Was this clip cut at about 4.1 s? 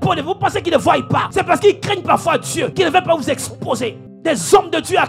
yes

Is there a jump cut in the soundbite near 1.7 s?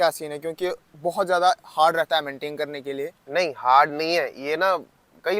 no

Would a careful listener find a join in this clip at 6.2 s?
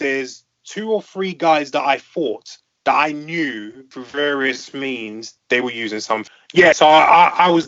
yes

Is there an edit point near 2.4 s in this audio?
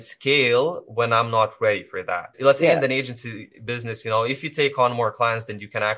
yes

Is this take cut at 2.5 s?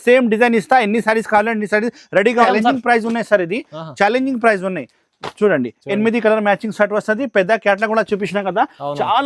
yes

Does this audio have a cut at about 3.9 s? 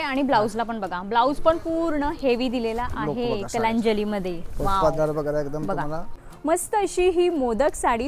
no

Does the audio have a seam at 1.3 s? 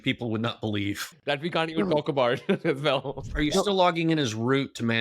no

